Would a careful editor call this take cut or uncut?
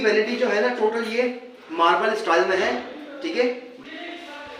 cut